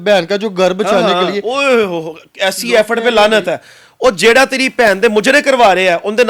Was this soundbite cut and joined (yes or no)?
no